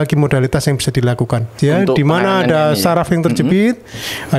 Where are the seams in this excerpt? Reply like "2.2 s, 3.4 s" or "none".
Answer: 1.5 s